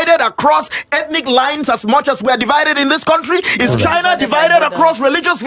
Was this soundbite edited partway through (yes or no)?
no